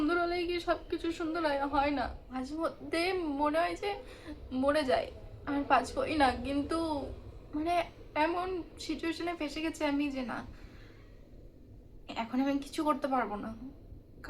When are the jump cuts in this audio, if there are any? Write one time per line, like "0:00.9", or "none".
0:02.5